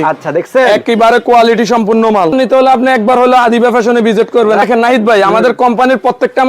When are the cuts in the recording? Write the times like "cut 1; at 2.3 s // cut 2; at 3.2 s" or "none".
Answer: cut 1; at 2.3 s // cut 2; at 4.6 s